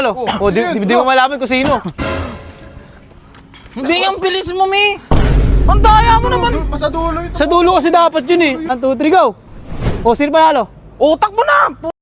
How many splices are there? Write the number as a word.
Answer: one